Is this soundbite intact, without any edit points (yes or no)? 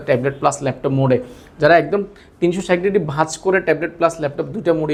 yes